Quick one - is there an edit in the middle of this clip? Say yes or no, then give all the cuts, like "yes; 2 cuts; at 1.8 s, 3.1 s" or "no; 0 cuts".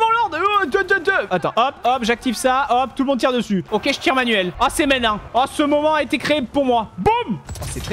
yes; 1 cut; at 3.7 s